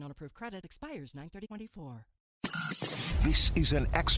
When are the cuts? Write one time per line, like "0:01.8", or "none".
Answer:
0:02.2